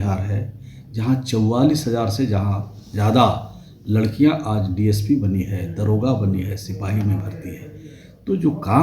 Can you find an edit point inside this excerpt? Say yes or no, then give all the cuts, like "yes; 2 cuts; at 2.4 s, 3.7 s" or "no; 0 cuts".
no; 0 cuts